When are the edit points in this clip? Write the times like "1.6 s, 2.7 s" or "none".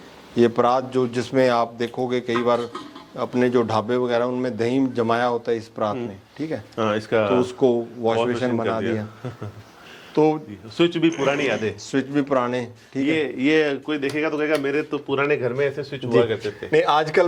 none